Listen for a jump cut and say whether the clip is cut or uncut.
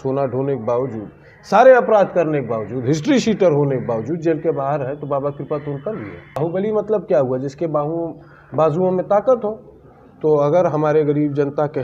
cut